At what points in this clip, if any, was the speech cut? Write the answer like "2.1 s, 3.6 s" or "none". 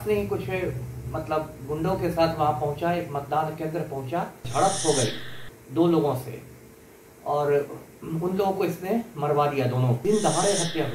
4.5 s, 10.0 s